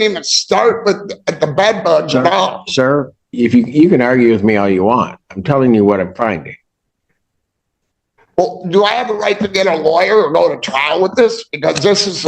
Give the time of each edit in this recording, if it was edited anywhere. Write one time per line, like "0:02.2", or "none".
none